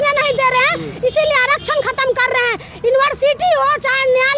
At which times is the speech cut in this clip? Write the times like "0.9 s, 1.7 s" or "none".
none